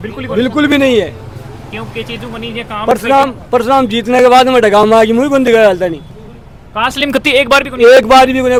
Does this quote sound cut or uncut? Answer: uncut